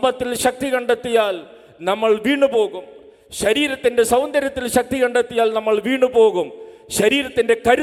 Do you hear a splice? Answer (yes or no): no